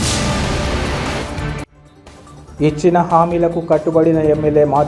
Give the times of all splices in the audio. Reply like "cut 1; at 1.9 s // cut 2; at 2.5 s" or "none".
cut 1; at 0.9 s